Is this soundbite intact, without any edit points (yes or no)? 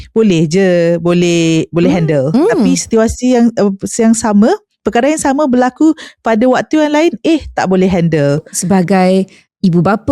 no